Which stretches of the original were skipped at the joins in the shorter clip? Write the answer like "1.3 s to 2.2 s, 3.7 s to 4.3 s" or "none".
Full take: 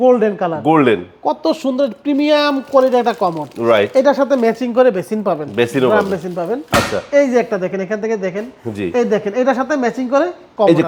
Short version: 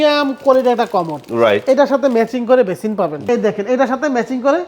5.5 s to 8.9 s